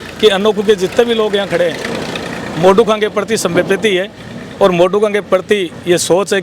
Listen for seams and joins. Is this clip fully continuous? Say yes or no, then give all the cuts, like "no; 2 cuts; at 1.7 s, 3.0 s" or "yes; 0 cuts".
yes; 0 cuts